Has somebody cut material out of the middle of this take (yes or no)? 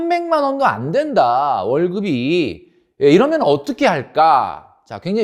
no